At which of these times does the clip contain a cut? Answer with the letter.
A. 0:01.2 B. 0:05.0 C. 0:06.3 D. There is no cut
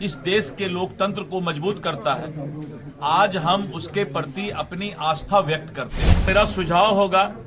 C